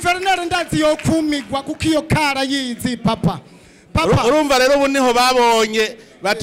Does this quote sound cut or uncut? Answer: uncut